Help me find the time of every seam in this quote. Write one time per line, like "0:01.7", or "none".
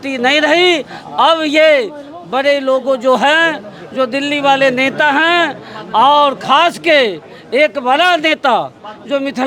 none